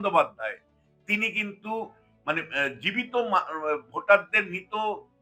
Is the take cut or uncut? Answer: uncut